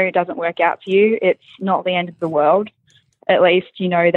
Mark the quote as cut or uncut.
uncut